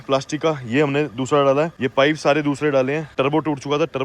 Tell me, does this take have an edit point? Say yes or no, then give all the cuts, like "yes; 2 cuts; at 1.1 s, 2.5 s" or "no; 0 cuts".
yes; 2 cuts; at 1.8 s, 3.1 s